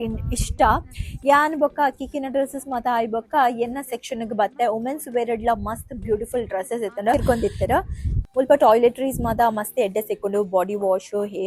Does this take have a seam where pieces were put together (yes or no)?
yes